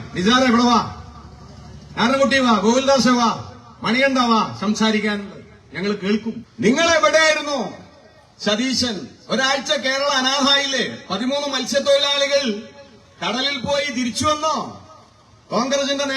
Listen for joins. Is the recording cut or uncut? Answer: cut